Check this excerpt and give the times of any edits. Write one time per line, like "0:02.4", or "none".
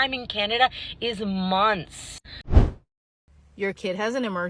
0:02.6

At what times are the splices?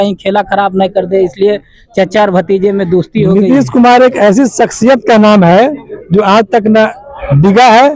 none

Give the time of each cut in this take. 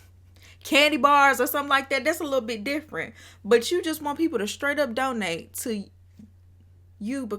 none

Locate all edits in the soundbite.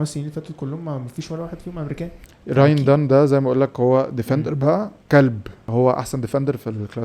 0:02.2
0:05.0
0:05.7

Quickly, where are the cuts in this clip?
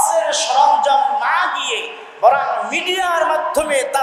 none

